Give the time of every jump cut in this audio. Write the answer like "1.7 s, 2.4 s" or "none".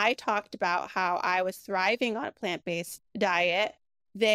3.0 s